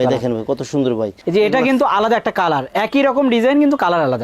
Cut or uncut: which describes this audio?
cut